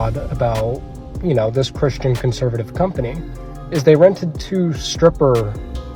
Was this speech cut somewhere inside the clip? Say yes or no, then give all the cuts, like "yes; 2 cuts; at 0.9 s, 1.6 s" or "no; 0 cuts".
no; 0 cuts